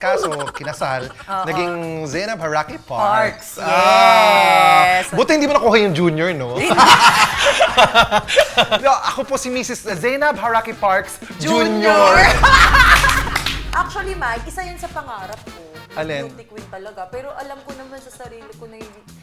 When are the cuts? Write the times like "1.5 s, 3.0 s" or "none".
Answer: 8.8 s, 13.6 s